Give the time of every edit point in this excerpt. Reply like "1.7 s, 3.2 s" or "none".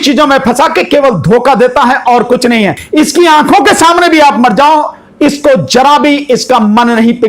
2.8 s